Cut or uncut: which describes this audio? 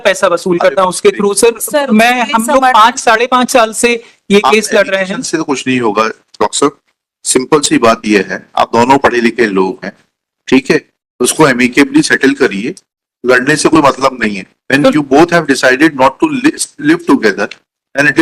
uncut